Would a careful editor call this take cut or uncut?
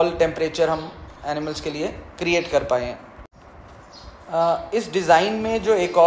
uncut